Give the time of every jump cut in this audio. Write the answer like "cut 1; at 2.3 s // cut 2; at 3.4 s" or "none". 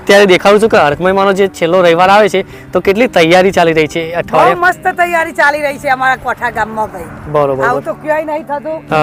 none